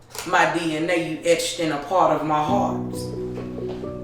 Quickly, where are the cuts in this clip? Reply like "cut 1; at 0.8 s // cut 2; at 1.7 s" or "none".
cut 1; at 2.7 s